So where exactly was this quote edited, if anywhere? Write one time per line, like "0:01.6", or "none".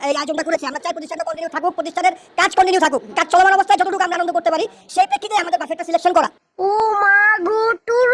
none